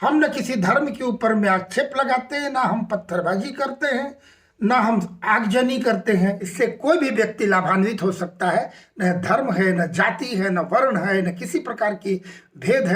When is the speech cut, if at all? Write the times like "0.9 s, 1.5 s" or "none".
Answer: 6.4 s